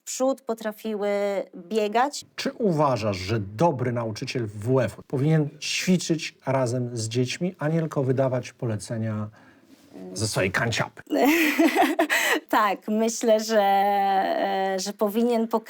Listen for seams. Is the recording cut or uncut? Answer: cut